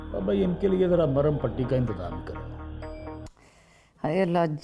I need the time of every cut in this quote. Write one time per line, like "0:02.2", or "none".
0:03.3

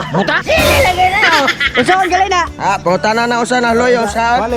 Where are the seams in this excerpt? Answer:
none

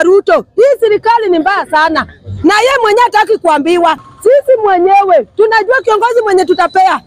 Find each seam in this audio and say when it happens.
0:04.1

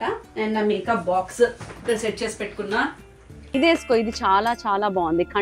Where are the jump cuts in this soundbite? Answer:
0:03.5

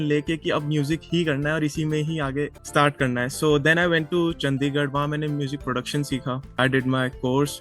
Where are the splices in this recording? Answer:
0:02.6
0:06.6

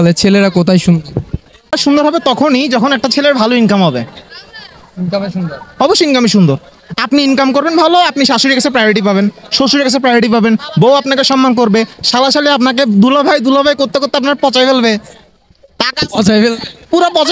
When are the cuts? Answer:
0:01.8

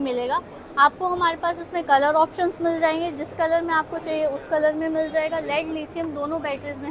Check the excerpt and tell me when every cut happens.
none

